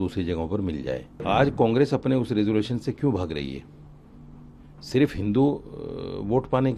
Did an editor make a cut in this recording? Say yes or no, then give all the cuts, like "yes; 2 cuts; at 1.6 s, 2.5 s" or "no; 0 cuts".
yes; 1 cut; at 1.2 s